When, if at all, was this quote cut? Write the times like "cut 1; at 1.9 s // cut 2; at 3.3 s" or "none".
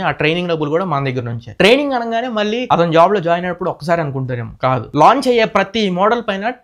none